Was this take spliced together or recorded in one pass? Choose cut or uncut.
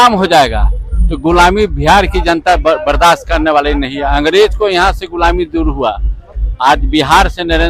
uncut